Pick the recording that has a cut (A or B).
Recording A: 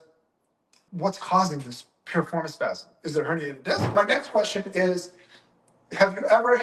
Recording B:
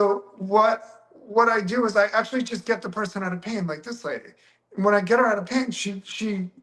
A